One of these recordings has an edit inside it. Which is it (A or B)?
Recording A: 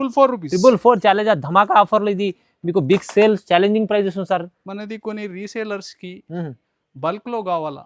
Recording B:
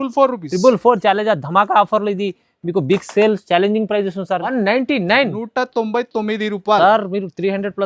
B